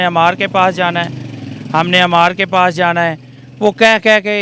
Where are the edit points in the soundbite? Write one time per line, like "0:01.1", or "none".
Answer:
none